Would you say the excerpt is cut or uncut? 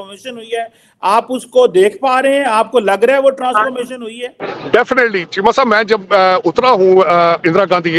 cut